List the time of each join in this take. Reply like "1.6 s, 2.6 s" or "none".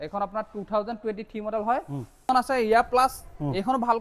2.3 s